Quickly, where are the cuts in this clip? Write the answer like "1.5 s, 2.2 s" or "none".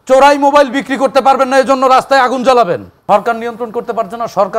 2.9 s